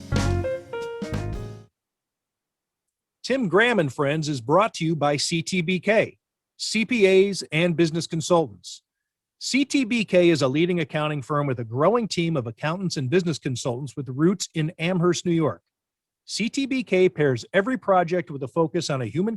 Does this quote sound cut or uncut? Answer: cut